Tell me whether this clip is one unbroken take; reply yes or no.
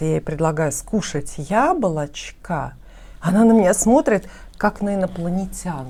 yes